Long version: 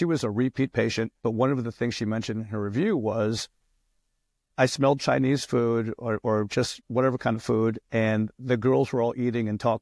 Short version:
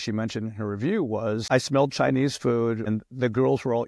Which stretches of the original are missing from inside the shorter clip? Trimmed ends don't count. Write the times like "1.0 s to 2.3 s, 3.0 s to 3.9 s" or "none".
3.4 s to 4.5 s, 6.0 s to 8.2 s